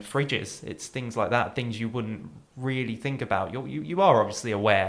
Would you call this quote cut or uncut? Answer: uncut